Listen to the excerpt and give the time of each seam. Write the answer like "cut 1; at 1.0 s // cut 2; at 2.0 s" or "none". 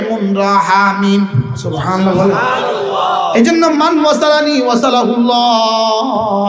none